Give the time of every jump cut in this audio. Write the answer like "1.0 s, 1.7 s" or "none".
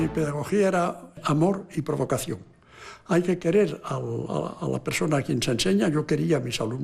1.2 s